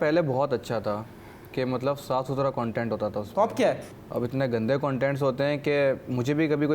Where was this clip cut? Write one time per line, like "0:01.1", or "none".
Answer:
none